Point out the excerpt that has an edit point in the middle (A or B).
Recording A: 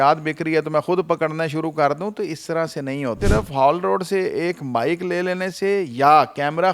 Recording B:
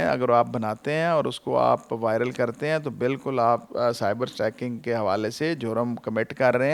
A